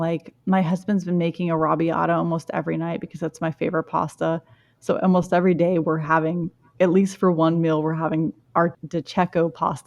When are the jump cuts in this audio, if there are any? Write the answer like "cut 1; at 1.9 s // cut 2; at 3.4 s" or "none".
cut 1; at 8.8 s